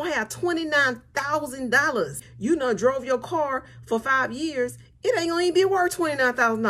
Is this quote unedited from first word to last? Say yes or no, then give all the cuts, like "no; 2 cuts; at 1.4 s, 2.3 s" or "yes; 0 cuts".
no; 1 cut; at 2.2 s